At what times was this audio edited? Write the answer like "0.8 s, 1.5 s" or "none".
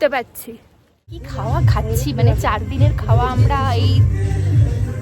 1.3 s